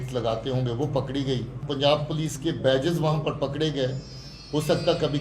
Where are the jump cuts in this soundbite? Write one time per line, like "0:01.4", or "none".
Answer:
0:01.6